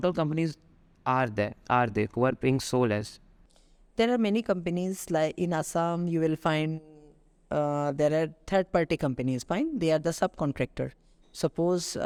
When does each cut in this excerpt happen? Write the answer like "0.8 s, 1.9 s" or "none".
none